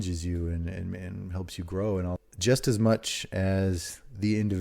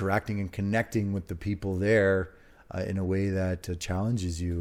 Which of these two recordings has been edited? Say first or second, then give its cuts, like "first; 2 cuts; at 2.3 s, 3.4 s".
first; 1 cut; at 2.2 s